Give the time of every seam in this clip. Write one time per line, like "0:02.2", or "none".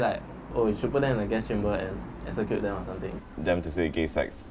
0:03.2